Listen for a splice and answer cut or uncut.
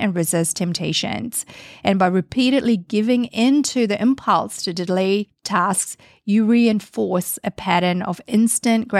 cut